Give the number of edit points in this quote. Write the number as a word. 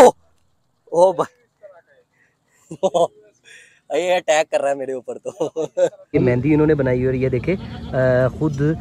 one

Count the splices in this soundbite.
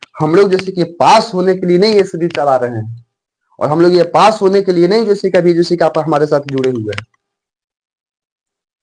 zero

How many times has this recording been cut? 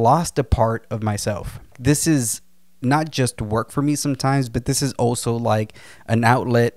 one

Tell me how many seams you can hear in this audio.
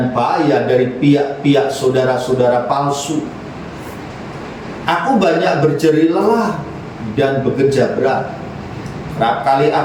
zero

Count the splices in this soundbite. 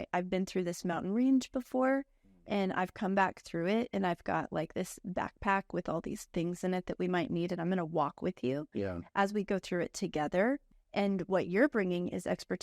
one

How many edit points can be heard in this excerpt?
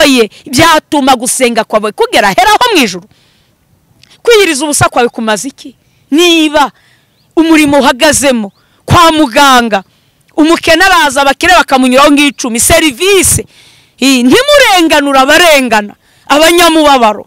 zero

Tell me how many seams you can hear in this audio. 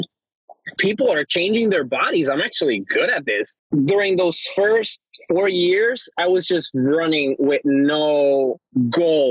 one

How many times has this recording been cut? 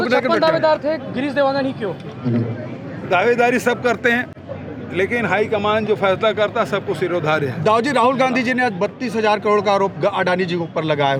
zero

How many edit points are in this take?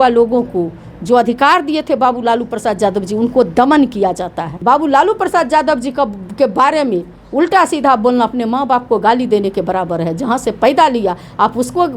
one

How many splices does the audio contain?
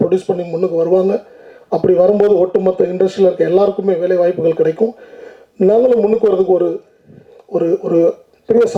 zero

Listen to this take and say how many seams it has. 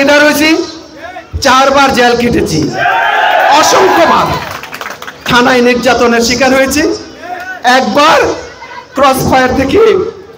zero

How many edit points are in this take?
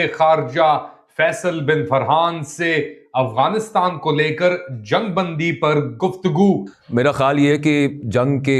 one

